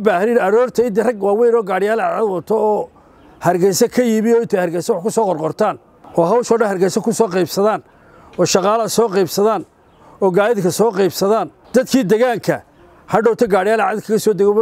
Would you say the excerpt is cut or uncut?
uncut